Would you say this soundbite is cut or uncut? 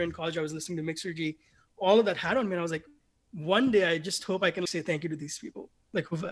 cut